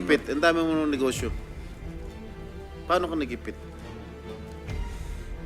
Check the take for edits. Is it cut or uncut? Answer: cut